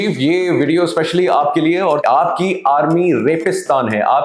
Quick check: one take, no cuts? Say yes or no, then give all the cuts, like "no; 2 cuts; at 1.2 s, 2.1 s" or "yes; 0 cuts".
no; 1 cut; at 2.0 s